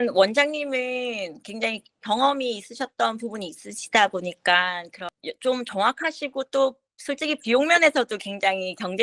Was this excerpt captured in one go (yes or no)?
yes